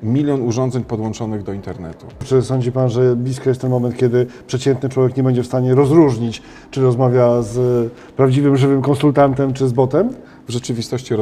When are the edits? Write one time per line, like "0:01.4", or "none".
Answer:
0:02.2
0:10.2